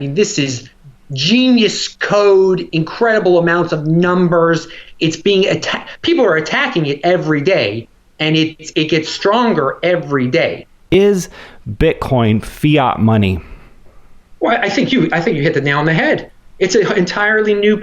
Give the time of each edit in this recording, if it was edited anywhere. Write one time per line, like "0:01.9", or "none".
0:10.9